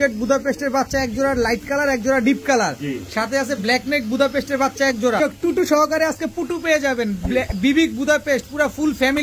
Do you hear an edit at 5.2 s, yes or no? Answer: yes